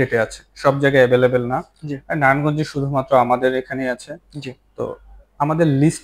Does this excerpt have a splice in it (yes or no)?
no